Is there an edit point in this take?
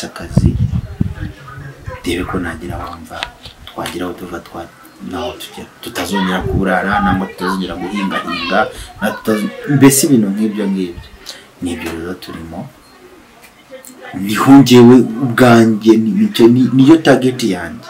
no; 0 cuts

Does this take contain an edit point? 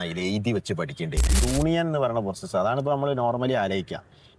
yes; 1 cut; at 1.4 s

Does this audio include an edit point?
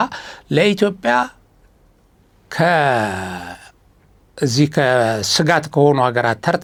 no; 0 cuts

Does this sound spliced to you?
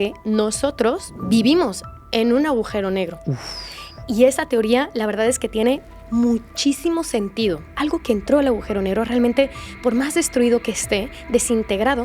yes; 2 cuts; at 1.1 s, 7.7 s

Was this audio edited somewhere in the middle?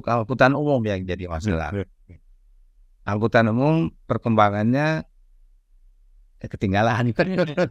no; 0 cuts

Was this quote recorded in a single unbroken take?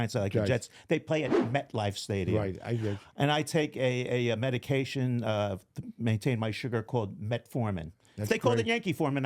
yes; 0 cuts

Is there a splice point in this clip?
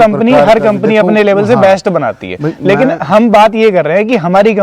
no; 0 cuts

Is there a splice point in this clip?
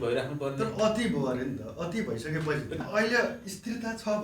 yes; 1 cut; at 2.8 s

